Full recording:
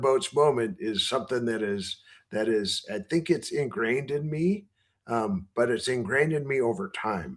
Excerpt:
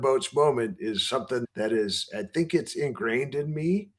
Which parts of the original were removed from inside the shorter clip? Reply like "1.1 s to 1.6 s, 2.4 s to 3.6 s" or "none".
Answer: 1.4 s to 2.2 s